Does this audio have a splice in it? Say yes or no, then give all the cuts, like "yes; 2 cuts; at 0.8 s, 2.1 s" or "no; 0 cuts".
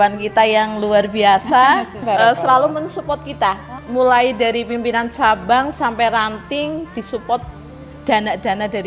yes; 2 cuts; at 2.0 s, 3.8 s